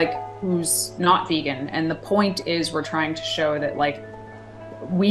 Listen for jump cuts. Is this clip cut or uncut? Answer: uncut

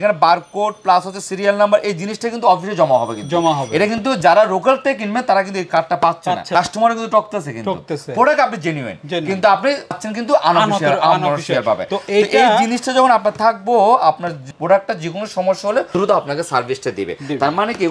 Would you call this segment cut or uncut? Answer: uncut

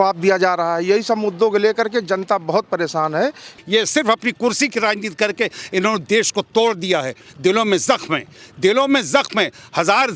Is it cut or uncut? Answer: cut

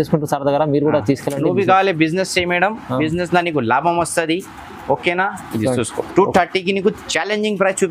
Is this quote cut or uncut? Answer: uncut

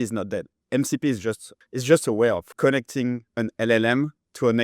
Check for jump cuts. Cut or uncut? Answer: cut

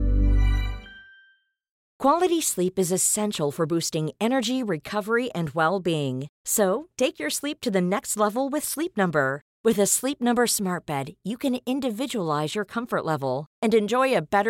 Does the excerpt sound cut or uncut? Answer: cut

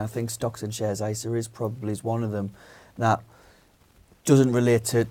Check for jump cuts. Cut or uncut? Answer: uncut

